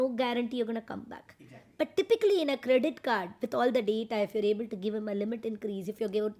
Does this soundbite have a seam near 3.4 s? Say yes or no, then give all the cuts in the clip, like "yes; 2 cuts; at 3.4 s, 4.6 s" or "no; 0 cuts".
no; 0 cuts